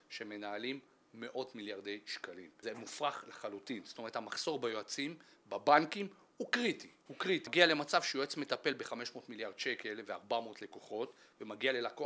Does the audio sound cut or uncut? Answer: cut